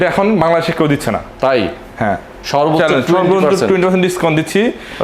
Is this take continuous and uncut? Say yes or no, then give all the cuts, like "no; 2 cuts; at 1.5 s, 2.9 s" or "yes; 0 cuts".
yes; 0 cuts